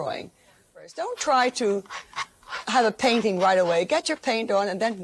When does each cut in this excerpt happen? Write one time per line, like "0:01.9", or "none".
0:01.0